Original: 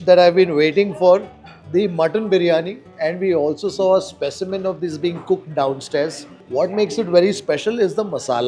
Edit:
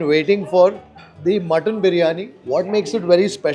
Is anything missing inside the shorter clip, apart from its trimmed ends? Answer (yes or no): yes